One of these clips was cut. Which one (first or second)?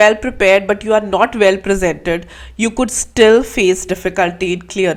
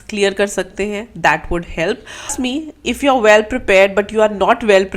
second